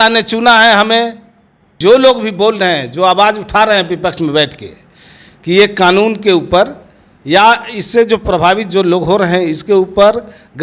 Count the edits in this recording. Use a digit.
1